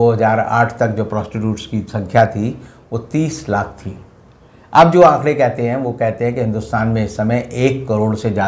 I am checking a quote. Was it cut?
no; 0 cuts

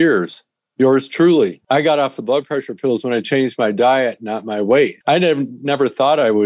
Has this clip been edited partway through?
yes; 2 cuts; at 1.6 s, 5.0 s

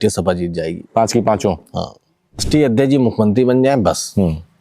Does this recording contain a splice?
yes; 1 cut; at 2.4 s

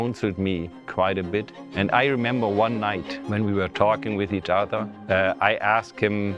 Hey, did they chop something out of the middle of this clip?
yes; 3 cuts; at 1.6 s, 3.1 s, 4.9 s

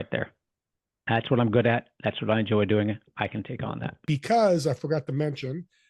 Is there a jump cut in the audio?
yes; 1 cut; at 4.1 s

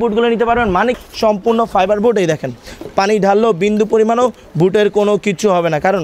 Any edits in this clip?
yes; 1 cut; at 1.0 s

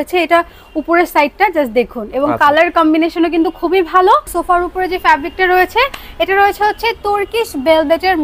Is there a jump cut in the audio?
yes; 1 cut; at 4.3 s

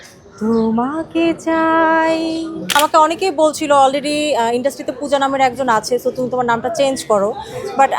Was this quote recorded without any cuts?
no; 1 cut; at 2.7 s

